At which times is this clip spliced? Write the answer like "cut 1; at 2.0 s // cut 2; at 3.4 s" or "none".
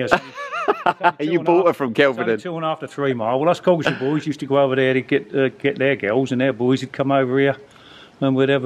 none